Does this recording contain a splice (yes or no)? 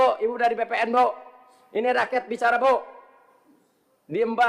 no